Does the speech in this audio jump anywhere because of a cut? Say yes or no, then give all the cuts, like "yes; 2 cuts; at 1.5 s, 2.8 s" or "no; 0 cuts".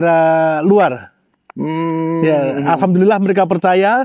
no; 0 cuts